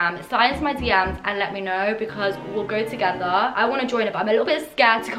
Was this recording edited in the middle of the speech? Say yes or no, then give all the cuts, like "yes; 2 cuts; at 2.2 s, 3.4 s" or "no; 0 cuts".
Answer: no; 0 cuts